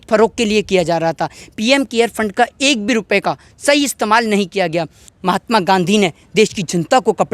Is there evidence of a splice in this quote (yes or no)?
yes